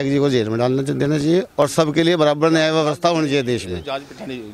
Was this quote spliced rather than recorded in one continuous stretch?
no; 0 cuts

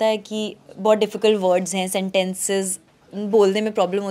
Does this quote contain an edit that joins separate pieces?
no; 0 cuts

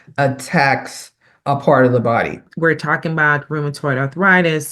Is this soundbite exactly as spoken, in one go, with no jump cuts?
no; 1 cut; at 2.5 s

